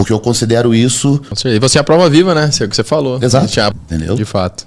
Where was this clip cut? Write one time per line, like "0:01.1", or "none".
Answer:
0:01.3
0:03.7